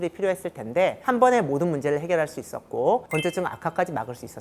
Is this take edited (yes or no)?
yes